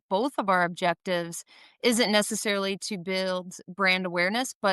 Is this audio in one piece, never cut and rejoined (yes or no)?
yes